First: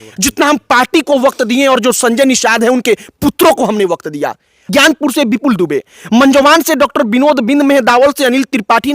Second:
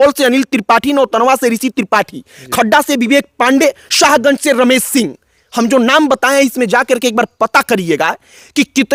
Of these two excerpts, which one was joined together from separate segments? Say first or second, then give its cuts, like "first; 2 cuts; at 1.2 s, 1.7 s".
first; 1 cut; at 4.6 s